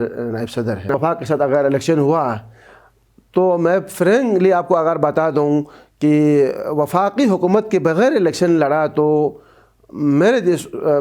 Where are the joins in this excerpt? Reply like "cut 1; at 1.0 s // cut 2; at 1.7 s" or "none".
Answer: cut 1; at 0.9 s